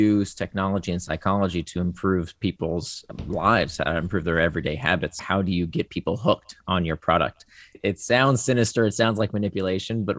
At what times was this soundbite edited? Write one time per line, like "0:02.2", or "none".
0:03.1
0:05.2
0:07.8